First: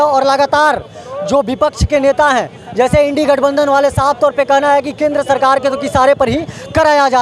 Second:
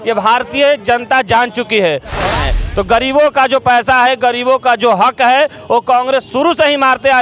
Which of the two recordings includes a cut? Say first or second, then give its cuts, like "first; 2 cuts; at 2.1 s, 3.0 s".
second; 1 cut; at 2.3 s